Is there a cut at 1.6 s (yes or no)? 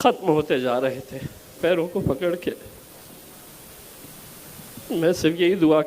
yes